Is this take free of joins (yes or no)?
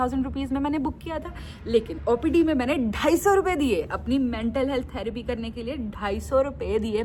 yes